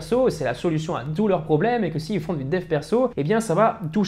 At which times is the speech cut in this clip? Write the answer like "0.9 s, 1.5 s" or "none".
3.1 s